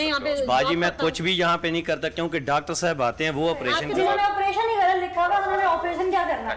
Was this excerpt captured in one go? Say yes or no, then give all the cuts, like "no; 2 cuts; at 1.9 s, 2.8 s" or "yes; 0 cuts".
no; 1 cut; at 3.8 s